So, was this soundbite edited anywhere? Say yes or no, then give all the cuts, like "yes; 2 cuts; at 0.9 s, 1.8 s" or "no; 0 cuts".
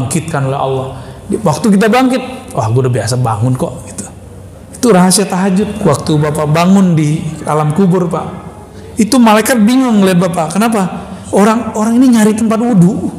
yes; 1 cut; at 5.7 s